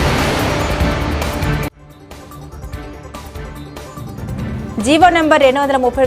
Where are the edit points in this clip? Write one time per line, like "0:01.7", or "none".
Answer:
none